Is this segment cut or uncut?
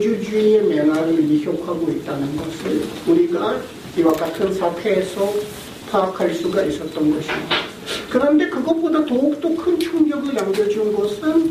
uncut